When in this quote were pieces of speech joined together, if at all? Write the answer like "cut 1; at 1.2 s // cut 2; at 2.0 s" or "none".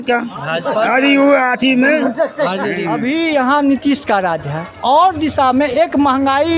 cut 1; at 2.9 s